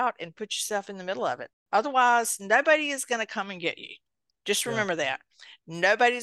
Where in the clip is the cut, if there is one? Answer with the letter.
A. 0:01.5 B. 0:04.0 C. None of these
A